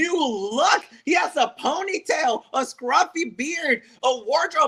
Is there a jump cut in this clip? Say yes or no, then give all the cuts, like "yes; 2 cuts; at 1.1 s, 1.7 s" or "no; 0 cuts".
no; 0 cuts